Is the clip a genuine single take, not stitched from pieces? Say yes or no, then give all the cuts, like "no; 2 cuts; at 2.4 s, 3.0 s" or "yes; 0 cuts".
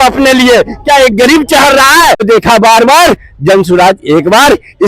no; 1 cut; at 2.2 s